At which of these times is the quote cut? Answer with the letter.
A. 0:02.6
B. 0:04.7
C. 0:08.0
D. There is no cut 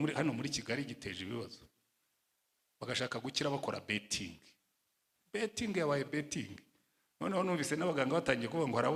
D